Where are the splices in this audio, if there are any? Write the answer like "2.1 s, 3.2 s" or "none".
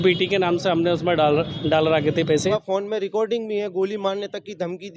2.5 s